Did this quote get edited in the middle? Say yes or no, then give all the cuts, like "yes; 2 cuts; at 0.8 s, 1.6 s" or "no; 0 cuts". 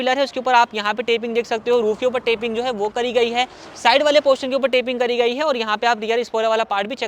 no; 0 cuts